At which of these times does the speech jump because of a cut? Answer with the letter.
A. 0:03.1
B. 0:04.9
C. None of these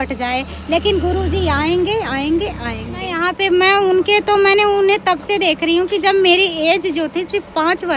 A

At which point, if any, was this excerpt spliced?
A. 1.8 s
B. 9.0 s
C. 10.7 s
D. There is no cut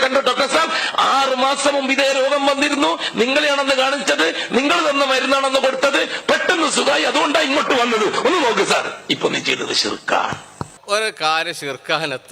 C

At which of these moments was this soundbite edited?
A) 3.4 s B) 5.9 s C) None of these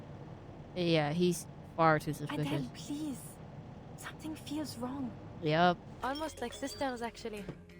B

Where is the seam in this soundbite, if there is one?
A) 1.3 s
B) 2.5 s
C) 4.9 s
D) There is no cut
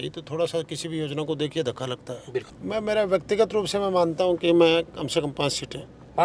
B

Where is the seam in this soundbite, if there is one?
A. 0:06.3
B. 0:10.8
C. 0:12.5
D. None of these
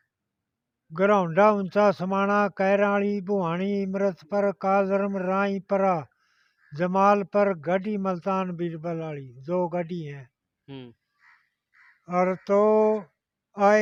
D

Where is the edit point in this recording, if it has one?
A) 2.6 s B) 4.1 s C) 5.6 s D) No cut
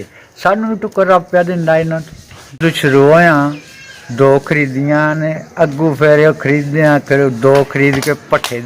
A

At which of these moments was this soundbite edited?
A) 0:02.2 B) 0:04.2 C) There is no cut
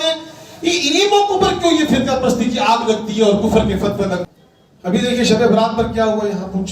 B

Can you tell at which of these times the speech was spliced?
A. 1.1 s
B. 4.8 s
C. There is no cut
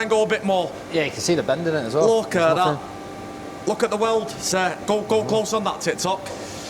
C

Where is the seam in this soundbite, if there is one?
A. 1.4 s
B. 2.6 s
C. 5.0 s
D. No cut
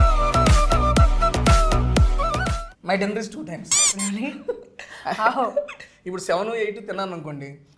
B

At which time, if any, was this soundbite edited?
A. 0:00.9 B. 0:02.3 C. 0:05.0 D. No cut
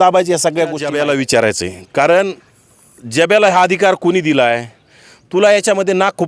A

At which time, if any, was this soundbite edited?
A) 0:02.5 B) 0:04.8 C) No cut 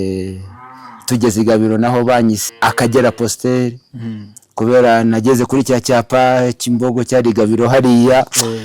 A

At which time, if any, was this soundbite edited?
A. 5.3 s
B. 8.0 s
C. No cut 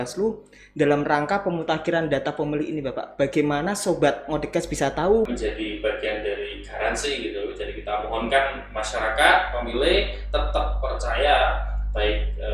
A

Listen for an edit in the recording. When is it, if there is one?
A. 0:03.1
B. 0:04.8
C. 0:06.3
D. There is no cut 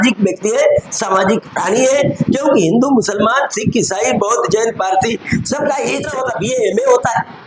C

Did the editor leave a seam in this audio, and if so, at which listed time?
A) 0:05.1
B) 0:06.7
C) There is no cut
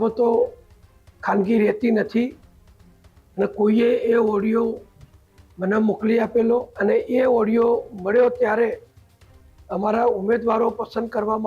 B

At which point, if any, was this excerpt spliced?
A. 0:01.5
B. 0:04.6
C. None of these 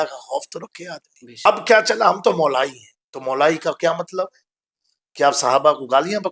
A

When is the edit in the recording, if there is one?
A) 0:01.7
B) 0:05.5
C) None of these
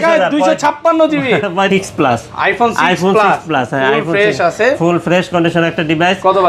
A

